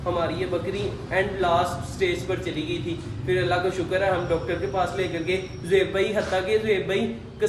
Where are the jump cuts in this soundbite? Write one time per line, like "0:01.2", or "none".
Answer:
none